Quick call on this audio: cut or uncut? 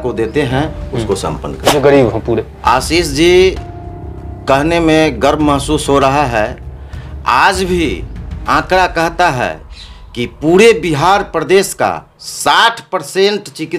cut